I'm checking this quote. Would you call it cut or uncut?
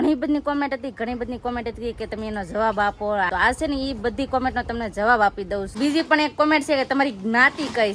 cut